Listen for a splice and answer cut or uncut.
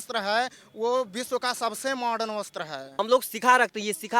cut